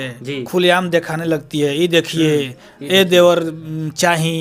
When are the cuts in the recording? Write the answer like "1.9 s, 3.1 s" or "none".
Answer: none